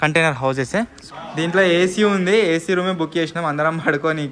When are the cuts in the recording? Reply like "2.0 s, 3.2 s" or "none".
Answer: 1.0 s